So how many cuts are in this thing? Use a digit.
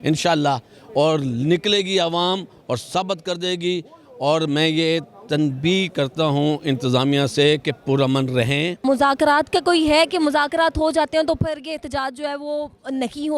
1